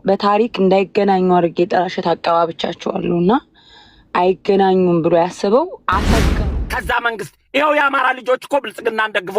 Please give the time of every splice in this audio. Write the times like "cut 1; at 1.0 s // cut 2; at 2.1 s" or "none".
cut 1; at 6.2 s